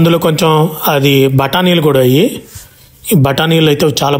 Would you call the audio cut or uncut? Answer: uncut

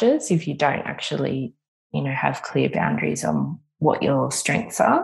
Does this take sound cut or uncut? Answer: cut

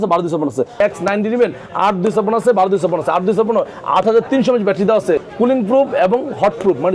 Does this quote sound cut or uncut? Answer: cut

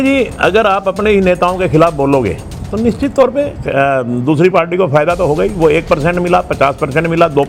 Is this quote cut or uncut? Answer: uncut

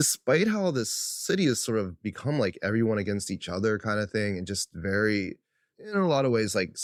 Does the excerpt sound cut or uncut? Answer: uncut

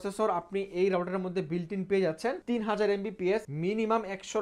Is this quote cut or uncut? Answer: cut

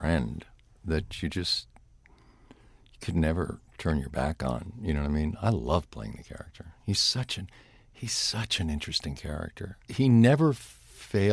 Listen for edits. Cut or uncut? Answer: cut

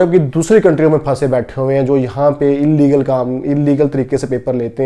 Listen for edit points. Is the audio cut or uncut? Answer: uncut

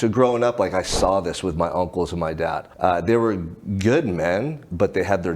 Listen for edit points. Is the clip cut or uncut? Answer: cut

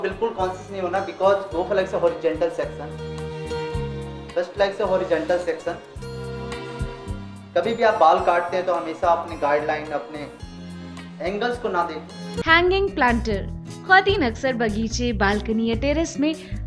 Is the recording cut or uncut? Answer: cut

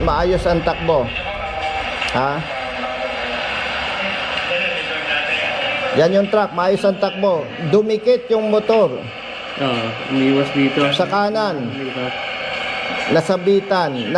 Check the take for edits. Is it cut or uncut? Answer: uncut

